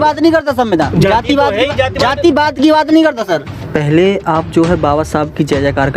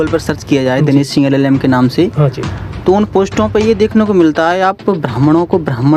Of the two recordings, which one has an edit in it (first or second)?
first